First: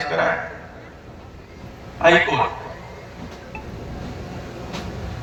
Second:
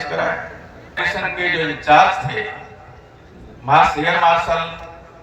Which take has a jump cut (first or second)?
second